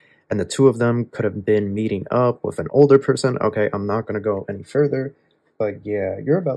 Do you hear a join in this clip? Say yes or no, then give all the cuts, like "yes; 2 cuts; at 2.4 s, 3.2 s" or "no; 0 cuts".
no; 0 cuts